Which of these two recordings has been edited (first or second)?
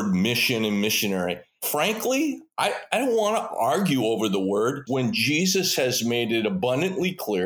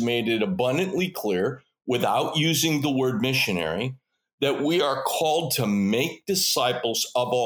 first